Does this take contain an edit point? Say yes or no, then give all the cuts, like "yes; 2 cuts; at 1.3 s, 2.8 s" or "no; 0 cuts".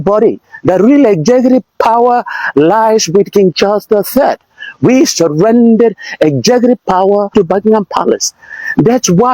yes; 1 cut; at 7.3 s